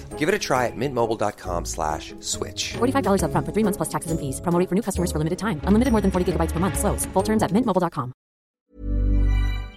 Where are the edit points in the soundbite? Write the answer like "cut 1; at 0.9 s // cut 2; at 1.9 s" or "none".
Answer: cut 1; at 8.6 s